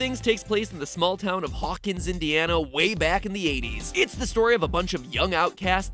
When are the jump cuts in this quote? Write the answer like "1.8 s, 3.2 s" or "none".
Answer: none